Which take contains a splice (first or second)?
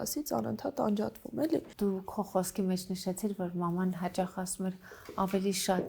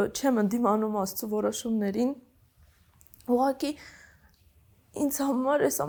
first